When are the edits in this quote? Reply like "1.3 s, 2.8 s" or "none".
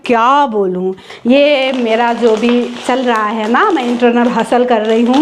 1.1 s